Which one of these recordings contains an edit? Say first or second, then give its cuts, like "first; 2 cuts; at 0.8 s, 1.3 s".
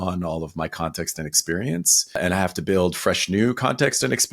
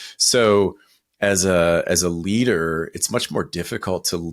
first; 1 cut; at 2.2 s